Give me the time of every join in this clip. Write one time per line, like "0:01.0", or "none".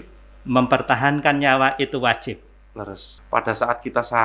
0:03.1